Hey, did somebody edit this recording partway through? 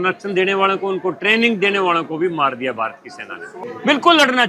yes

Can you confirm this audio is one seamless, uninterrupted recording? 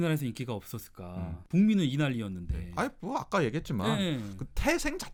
yes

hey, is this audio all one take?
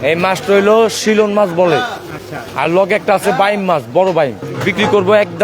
no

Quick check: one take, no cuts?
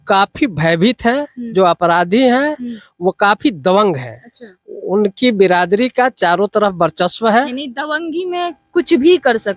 yes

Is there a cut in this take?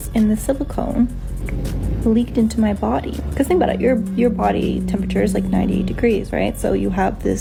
no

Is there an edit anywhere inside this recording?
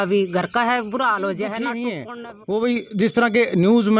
yes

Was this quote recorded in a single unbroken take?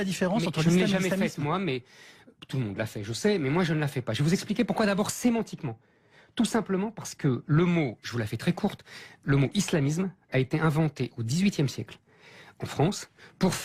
yes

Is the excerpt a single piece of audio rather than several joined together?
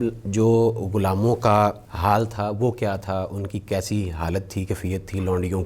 no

